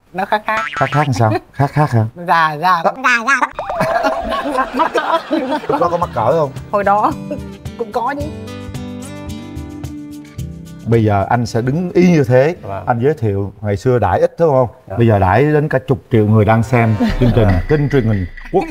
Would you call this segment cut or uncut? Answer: uncut